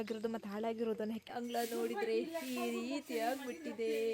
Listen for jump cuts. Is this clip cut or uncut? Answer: cut